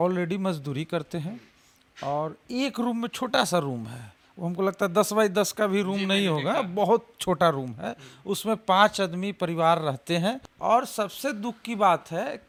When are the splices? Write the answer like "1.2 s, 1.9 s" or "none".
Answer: none